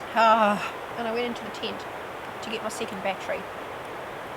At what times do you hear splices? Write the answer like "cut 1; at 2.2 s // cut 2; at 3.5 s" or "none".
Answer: cut 1; at 0.9 s